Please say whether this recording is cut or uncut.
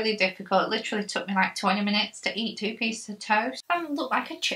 cut